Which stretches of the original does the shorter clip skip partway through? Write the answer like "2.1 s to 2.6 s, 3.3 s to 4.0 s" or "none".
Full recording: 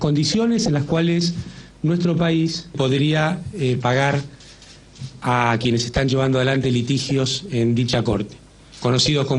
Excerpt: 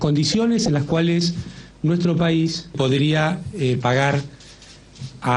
none